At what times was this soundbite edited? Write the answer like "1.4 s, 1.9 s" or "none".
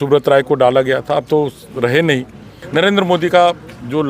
2.6 s